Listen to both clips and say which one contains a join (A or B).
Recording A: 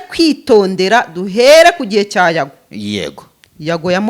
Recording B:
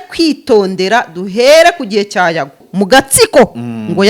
B